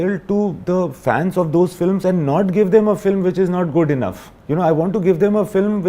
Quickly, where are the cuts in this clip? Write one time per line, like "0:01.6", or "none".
none

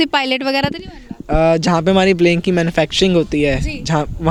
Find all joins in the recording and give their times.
none

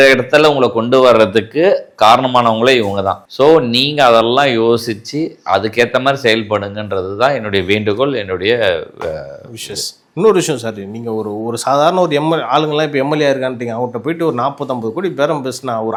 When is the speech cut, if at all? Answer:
none

